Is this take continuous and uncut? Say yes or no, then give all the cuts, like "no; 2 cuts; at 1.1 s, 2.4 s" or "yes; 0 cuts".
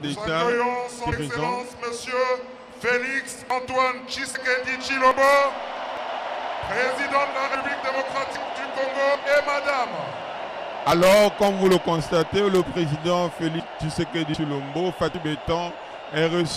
yes; 0 cuts